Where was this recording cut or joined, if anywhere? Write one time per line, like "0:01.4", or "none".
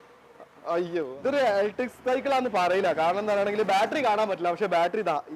0:01.1